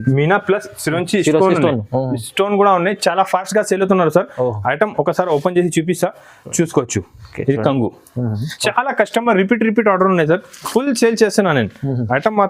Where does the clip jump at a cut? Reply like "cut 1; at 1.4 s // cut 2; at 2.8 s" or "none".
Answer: cut 1; at 8.5 s